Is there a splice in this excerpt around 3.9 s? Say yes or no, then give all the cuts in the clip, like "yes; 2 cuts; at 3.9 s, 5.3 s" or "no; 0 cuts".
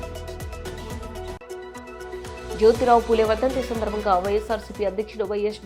no; 1 cut; at 1.3 s